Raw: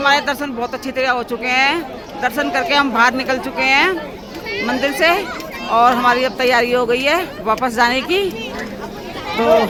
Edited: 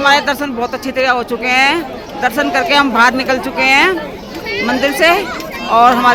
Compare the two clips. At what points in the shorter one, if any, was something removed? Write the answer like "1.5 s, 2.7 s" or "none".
none